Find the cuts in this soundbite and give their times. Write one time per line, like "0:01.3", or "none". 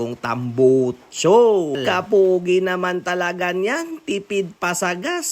0:01.8